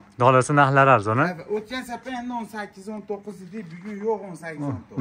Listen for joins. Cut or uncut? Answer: uncut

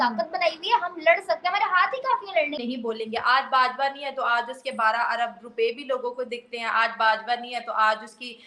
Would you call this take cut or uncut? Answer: cut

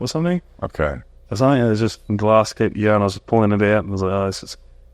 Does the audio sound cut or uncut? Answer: cut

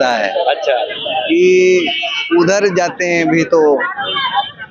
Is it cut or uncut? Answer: uncut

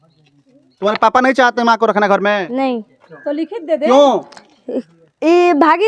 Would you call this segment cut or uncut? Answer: uncut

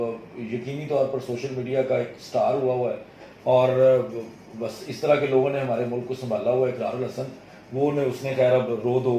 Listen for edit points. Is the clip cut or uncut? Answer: uncut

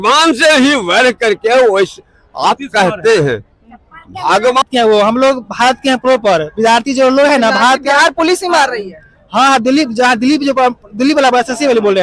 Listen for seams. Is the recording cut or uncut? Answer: cut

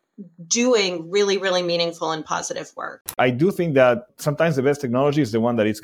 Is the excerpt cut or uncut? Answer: cut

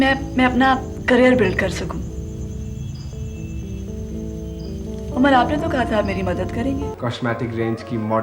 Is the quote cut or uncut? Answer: cut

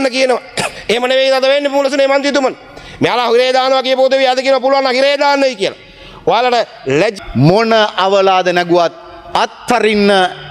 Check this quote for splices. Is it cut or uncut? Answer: cut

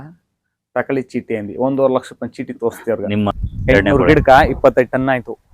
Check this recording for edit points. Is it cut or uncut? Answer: cut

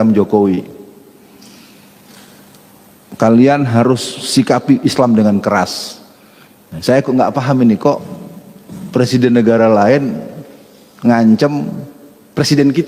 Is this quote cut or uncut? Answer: uncut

